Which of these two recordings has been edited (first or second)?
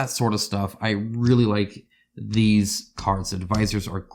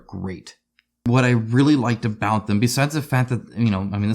second